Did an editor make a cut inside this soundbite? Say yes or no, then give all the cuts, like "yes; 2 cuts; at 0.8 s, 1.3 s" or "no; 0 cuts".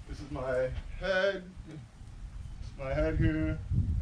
no; 0 cuts